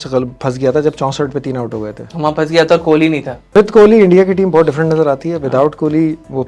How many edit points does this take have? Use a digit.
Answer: 2